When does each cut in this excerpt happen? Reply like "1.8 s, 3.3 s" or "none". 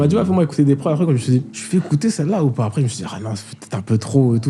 1.6 s